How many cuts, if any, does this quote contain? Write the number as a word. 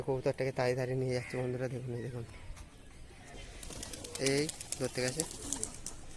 one